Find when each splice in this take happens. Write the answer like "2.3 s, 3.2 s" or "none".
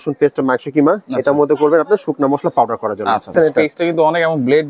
3.3 s